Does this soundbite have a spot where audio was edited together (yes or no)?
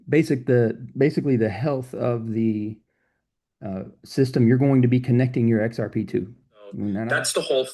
yes